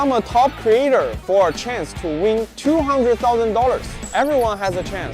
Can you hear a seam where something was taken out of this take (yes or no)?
yes